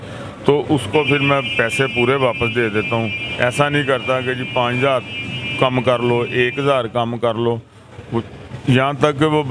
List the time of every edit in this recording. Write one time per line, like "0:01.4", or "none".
none